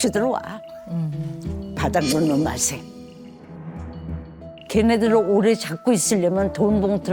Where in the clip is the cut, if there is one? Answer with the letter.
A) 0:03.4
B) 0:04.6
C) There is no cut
A